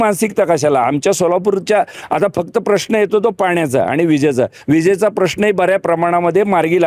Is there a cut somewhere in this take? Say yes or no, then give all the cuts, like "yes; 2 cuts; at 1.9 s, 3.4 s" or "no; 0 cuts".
no; 0 cuts